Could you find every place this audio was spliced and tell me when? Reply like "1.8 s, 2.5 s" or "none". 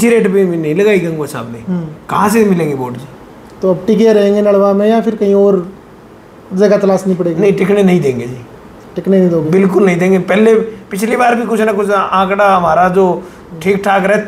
none